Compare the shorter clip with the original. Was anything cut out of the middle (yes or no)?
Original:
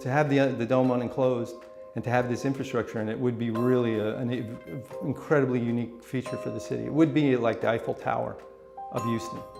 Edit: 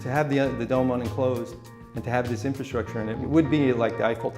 yes